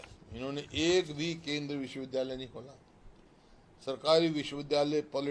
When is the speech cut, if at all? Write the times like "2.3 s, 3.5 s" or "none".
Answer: none